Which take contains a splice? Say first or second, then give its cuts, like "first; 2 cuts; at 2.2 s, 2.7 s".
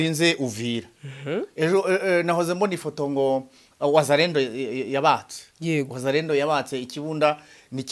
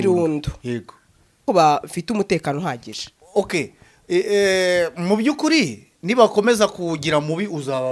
second; 1 cut; at 1.4 s